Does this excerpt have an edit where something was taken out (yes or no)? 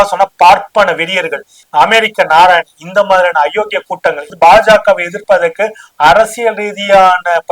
yes